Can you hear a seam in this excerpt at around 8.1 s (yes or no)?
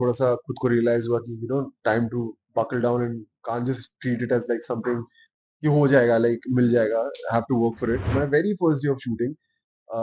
yes